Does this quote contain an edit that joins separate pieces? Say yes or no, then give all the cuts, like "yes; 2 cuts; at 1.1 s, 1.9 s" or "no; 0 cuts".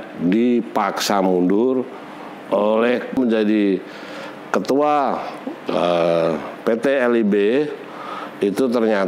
yes; 1 cut; at 3.1 s